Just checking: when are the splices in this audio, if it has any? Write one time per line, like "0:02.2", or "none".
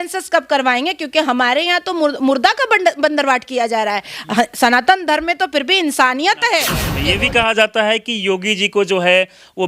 0:06.8